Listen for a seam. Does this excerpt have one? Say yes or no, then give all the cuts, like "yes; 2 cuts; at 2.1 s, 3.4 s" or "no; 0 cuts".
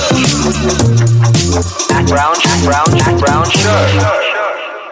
no; 0 cuts